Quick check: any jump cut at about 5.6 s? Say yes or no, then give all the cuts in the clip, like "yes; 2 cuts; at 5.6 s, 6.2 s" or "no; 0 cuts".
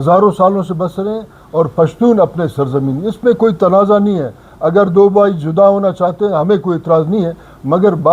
no; 0 cuts